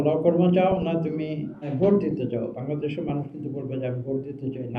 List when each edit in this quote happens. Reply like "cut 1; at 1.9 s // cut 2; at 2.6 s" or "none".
cut 1; at 1.7 s